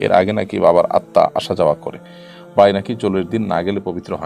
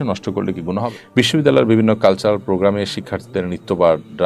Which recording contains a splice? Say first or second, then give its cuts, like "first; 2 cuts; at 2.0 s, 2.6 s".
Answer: second; 1 cut; at 0.9 s